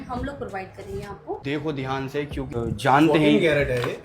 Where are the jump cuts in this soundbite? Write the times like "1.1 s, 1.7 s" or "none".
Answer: 1.4 s, 2.5 s